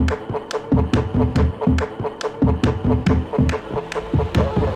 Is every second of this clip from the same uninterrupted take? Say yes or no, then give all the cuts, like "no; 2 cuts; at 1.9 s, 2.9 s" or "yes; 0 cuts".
no; 2 cuts; at 1.3 s, 3.0 s